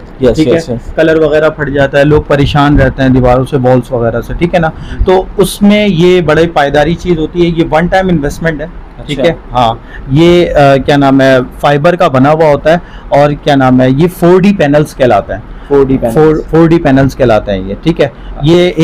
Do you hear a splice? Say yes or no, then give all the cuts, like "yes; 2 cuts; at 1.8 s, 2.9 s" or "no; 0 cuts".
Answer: no; 0 cuts